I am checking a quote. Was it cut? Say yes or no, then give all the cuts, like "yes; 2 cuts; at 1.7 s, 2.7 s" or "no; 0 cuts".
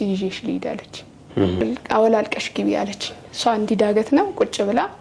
yes; 1 cut; at 1.6 s